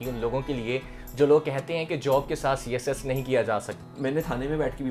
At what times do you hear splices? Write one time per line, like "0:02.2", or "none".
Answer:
0:03.8